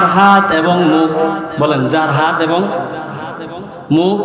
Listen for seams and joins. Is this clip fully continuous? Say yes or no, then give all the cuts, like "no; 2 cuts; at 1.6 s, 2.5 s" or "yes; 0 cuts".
no; 1 cut; at 1.5 s